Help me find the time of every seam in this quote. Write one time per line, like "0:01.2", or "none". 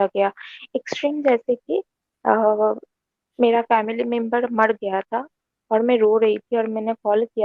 none